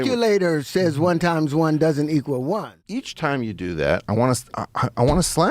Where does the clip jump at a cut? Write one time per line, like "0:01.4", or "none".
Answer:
0:03.0